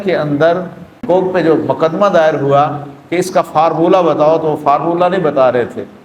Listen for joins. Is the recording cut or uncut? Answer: cut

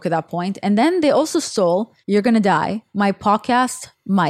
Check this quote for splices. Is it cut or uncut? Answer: cut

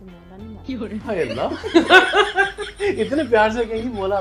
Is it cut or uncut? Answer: uncut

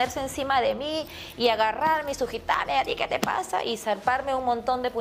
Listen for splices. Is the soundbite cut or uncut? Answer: uncut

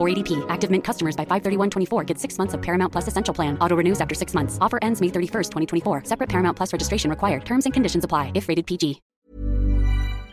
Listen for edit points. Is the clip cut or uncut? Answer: cut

